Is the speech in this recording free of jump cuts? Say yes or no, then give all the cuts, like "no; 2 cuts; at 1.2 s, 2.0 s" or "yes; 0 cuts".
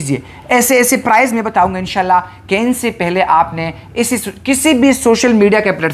yes; 0 cuts